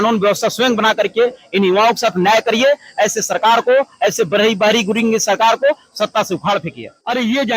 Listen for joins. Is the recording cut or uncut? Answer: uncut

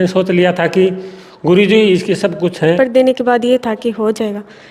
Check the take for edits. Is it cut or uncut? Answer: cut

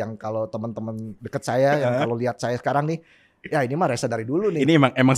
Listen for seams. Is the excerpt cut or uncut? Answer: uncut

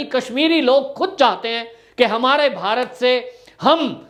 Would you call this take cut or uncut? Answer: uncut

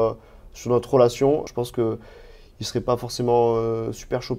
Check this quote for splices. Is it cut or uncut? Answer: cut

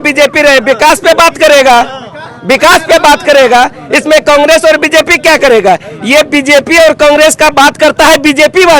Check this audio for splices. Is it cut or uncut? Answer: uncut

